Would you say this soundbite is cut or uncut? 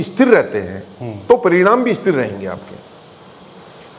uncut